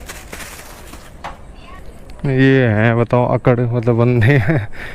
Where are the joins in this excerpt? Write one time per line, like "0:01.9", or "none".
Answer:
0:01.8